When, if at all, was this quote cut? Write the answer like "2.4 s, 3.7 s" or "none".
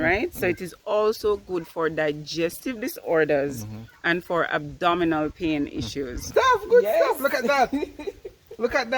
6.2 s